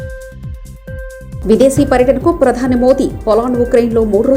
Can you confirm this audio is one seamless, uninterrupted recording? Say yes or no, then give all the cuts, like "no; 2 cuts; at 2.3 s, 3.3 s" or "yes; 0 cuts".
yes; 0 cuts